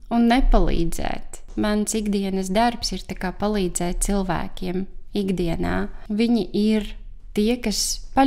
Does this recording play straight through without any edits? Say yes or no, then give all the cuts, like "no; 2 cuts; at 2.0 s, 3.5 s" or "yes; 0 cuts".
no; 2 cuts; at 1.5 s, 6.0 s